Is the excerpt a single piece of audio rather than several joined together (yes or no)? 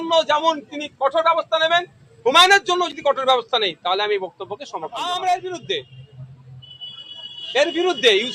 no